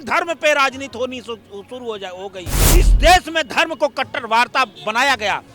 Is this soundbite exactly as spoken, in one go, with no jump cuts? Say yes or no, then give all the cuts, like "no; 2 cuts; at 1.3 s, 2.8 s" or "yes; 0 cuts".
no; 1 cut; at 2.6 s